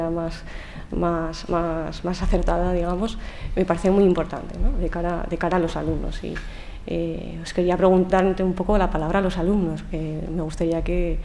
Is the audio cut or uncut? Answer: cut